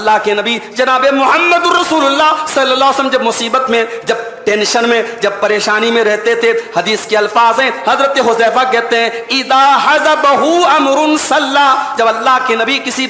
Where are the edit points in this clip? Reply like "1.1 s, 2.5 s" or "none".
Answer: none